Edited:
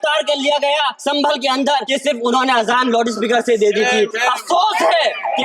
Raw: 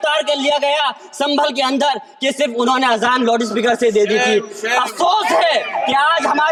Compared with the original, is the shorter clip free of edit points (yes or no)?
no